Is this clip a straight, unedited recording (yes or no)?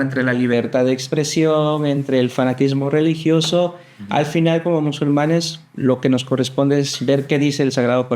yes